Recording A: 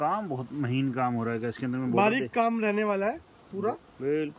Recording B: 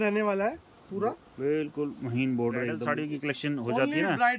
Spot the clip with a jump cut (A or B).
B